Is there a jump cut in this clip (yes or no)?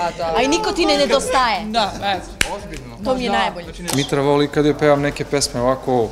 yes